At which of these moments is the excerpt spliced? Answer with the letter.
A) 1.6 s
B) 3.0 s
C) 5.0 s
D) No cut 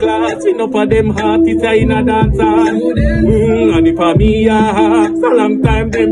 D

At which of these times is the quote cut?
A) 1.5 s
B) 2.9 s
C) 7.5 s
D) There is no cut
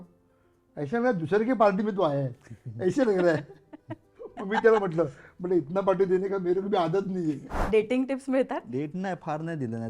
C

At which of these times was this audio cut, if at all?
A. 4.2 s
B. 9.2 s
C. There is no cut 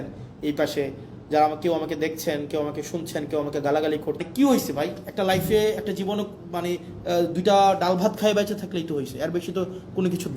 A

